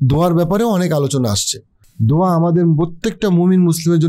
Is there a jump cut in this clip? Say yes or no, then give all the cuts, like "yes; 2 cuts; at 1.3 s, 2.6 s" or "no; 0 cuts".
yes; 1 cut; at 1.6 s